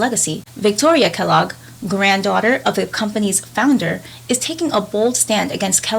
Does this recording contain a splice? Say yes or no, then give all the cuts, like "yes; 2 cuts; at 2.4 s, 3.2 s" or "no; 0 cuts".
no; 0 cuts